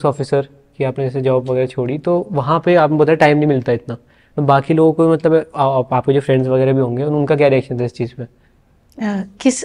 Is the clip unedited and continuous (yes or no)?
yes